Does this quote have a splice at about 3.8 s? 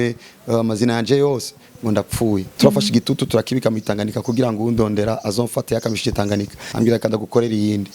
no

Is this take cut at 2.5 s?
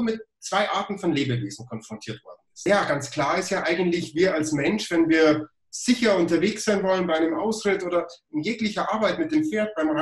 yes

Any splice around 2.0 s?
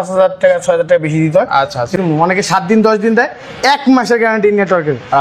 yes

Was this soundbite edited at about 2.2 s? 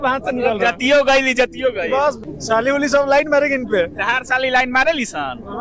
yes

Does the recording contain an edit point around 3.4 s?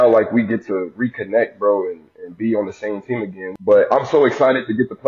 yes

